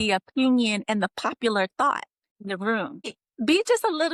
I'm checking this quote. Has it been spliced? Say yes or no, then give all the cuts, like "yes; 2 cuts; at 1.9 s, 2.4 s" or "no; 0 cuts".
yes; 2 cuts; at 2.3 s, 3.2 s